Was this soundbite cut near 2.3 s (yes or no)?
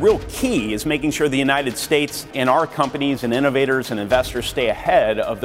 yes